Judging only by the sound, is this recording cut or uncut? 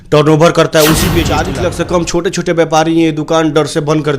cut